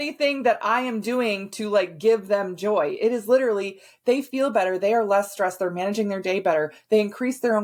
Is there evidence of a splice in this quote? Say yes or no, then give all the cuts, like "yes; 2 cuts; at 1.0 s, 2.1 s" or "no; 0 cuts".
no; 0 cuts